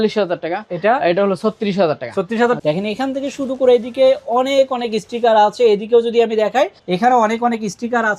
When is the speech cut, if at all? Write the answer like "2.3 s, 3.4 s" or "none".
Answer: 2.6 s